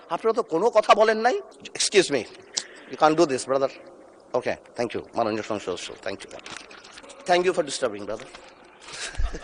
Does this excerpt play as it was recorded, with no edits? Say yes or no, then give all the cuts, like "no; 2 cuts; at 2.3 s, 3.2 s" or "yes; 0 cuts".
no; 2 cuts; at 1.5 s, 6.9 s